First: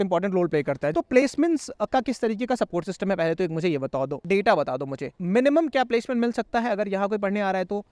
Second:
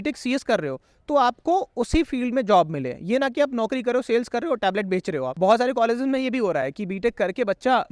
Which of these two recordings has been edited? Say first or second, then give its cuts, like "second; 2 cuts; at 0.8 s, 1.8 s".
first; 2 cuts; at 0.9 s, 4.2 s